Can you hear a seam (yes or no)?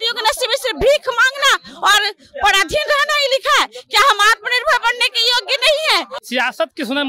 yes